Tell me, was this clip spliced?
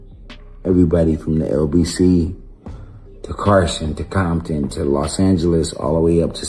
no; 0 cuts

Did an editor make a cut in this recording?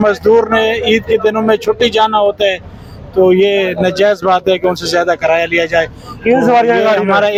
no; 0 cuts

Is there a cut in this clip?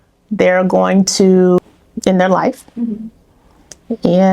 yes; 1 cut; at 1.6 s

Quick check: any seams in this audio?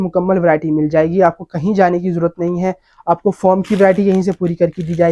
no; 0 cuts

